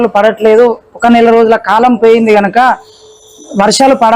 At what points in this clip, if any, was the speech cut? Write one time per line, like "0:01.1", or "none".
none